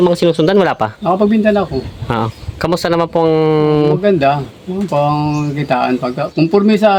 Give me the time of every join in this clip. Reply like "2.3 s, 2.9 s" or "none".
none

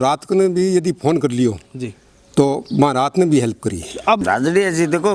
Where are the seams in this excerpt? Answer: 4.2 s

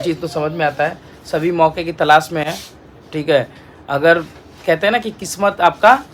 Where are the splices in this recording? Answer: none

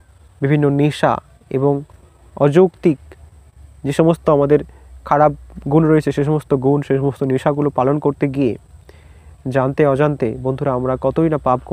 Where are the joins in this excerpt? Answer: none

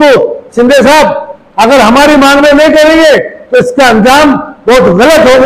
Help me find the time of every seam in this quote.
none

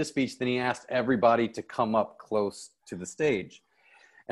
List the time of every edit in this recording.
none

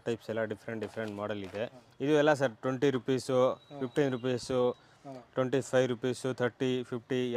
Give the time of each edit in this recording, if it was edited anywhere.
1.8 s

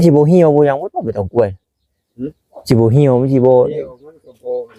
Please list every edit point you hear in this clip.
none

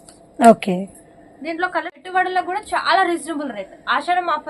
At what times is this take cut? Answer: 2.1 s

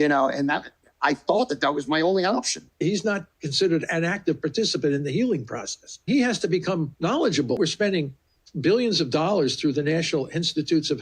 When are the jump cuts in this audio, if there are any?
2.8 s, 6.0 s, 7.6 s

